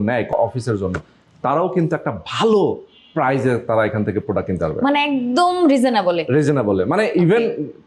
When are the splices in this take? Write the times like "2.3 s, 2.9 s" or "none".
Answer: none